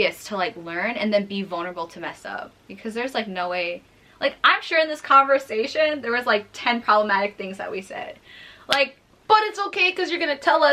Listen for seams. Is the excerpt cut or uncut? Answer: uncut